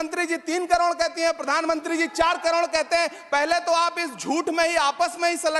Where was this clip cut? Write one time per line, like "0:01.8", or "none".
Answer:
none